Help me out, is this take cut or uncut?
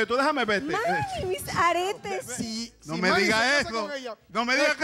cut